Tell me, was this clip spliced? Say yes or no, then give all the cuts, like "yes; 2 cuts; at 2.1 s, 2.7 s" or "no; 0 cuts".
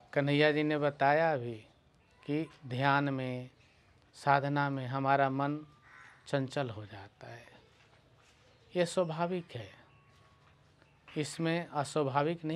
no; 0 cuts